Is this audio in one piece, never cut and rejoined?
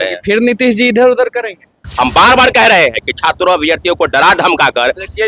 no; 1 cut; at 1.8 s

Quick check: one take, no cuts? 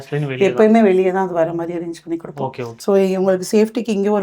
no; 1 cut; at 2.7 s

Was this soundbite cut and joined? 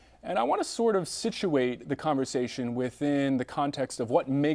no; 0 cuts

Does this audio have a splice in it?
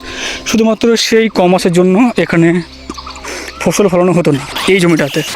no; 0 cuts

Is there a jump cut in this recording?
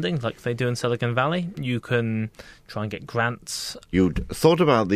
yes; 1 cut; at 3.9 s

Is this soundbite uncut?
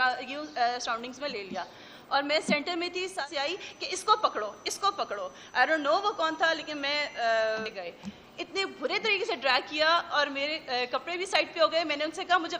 no; 2 cuts; at 3.2 s, 7.8 s

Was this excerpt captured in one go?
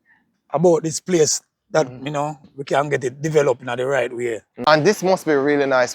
no; 1 cut; at 4.5 s

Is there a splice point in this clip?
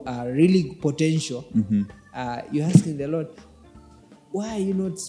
no; 0 cuts

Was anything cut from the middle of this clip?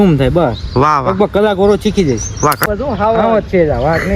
yes; 1 cut; at 2.7 s

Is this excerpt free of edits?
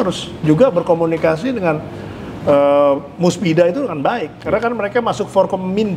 yes; 0 cuts

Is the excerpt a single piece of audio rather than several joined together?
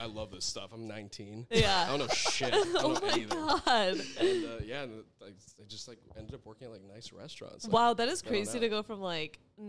yes; 0 cuts

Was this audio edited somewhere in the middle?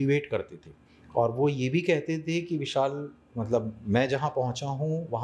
no; 0 cuts

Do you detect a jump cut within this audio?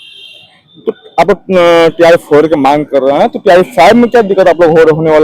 no; 0 cuts

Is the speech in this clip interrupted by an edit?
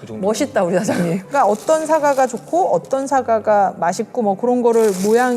yes; 1 cut; at 1.2 s

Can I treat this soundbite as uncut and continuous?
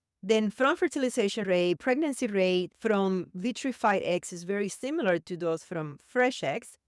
yes; 0 cuts

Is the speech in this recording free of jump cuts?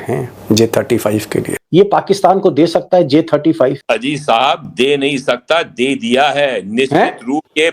no; 1 cut; at 1.6 s

